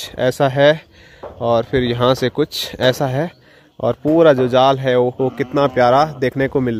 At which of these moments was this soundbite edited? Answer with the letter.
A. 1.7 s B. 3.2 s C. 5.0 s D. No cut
D